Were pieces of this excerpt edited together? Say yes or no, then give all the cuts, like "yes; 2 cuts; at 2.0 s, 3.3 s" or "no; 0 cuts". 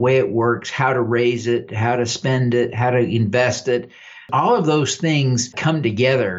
yes; 2 cuts; at 4.3 s, 5.5 s